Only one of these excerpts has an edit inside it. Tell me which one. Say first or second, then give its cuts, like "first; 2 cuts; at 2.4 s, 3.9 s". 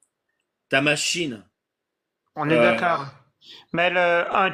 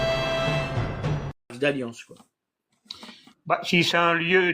second; 1 cut; at 1.5 s